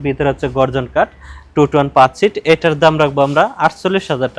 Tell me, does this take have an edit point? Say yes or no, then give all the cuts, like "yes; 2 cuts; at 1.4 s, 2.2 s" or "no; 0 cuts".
no; 0 cuts